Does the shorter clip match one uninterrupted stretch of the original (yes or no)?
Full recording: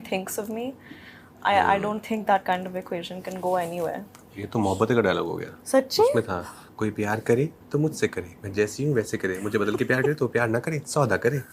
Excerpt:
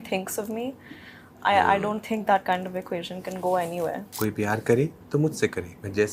no